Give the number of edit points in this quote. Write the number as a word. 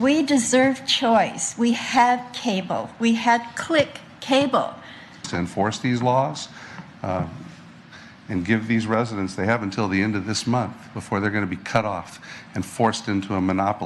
one